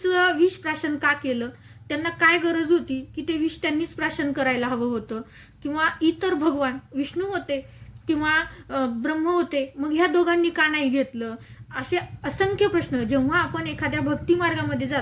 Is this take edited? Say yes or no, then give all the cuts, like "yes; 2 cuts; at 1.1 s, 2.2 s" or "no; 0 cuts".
no; 0 cuts